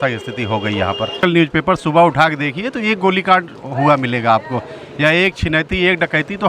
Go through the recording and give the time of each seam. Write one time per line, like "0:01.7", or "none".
0:01.2